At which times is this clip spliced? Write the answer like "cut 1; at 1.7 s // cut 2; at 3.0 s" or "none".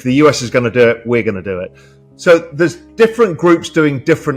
cut 1; at 2.8 s